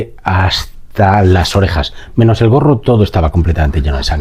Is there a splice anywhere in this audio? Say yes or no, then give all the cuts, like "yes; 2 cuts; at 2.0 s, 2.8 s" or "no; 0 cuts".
no; 0 cuts